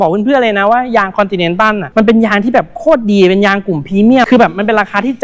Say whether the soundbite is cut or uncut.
cut